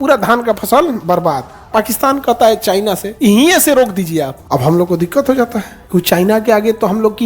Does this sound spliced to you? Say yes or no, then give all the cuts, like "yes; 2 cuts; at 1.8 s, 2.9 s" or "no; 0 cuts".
yes; 4 cuts; at 1.4 s, 3.1 s, 4.4 s, 5.7 s